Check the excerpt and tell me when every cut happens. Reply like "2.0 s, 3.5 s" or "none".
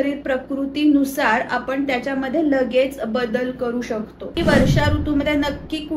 4.4 s